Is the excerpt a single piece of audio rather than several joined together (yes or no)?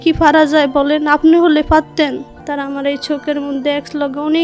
no